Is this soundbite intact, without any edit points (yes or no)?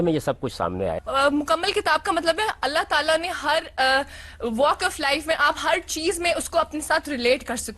no